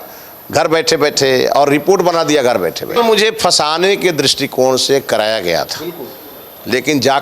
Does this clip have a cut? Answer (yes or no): yes